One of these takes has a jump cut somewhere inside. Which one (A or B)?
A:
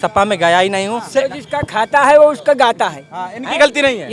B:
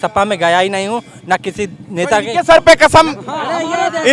A